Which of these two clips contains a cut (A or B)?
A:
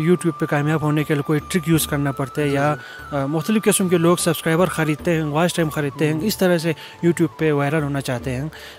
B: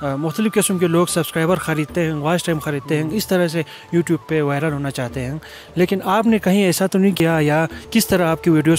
B